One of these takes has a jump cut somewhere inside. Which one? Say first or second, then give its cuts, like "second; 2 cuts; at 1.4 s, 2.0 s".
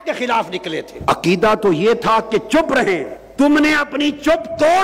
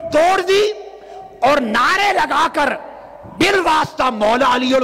first; 2 cuts; at 0.9 s, 3.2 s